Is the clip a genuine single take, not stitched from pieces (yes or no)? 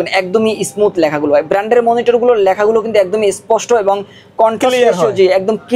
yes